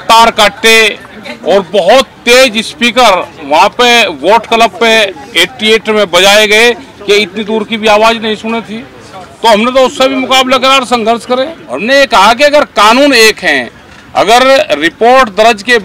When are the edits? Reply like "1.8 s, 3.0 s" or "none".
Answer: 11.6 s